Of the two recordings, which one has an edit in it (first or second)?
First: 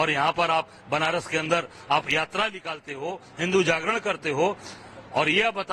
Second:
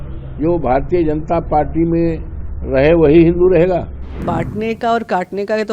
second